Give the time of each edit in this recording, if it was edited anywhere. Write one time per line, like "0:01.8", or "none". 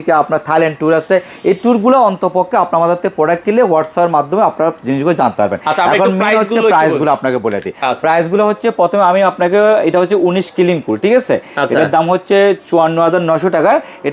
none